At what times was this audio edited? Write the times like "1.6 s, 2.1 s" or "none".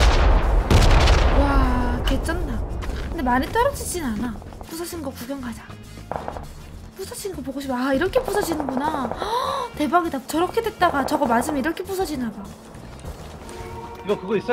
10.2 s, 13.5 s